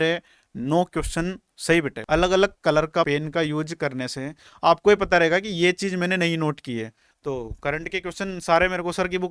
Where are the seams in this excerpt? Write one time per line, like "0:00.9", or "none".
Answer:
0:02.0
0:03.1
0:07.0